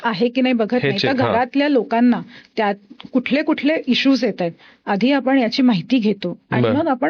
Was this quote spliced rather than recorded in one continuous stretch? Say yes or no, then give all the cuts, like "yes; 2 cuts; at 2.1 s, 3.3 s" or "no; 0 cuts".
no; 0 cuts